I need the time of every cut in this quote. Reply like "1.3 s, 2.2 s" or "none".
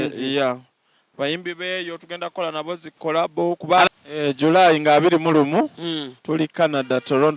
3.9 s